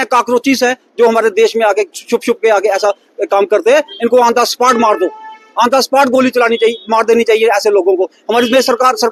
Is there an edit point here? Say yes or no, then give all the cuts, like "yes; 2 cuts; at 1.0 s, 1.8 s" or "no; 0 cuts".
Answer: no; 0 cuts